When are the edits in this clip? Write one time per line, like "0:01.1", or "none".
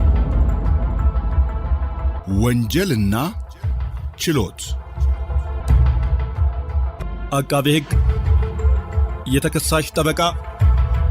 0:02.1